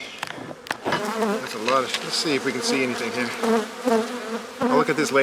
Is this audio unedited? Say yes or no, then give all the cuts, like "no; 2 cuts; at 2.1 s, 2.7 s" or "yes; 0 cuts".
no; 1 cut; at 1.0 s